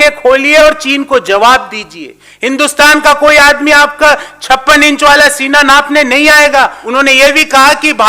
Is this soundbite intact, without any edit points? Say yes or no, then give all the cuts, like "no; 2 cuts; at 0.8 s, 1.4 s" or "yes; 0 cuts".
no; 1 cut; at 6.8 s